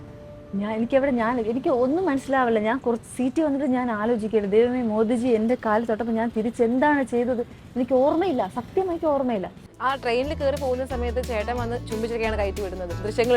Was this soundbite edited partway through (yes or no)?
yes